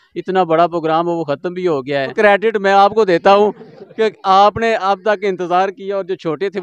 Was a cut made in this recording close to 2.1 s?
yes; 1 cut; at 2.1 s

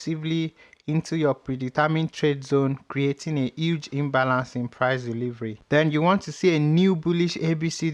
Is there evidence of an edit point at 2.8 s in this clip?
no; 0 cuts

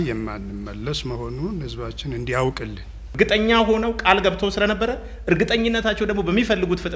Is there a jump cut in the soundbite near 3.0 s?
yes; 1 cut; at 3.0 s

